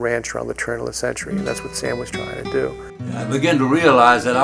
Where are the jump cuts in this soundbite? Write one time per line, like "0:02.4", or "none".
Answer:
0:03.2